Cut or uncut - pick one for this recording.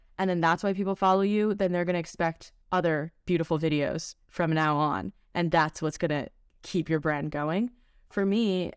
cut